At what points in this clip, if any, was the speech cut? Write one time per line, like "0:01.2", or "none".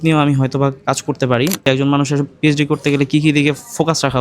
0:01.6